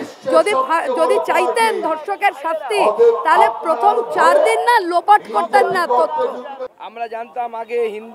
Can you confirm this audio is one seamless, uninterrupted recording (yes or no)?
no